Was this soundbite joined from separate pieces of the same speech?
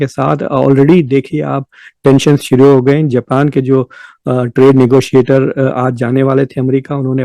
no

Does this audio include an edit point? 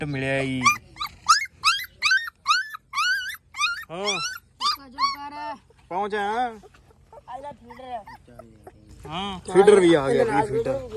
yes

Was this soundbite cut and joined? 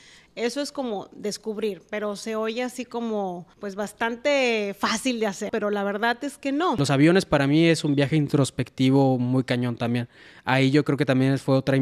yes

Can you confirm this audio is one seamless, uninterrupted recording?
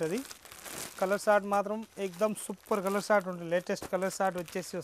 yes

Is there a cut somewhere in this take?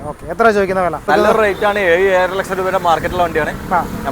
yes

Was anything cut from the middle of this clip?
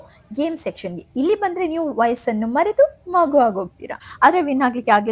yes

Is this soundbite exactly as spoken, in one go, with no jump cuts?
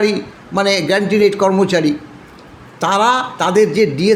yes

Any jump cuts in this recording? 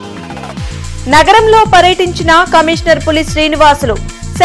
yes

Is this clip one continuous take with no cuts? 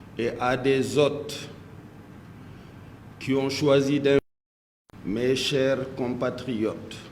no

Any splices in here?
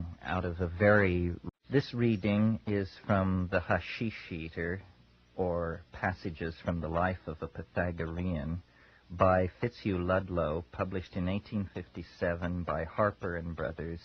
no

